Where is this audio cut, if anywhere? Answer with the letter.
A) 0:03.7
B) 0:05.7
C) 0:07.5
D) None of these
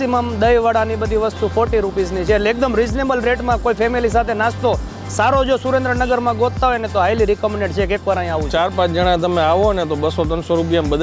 D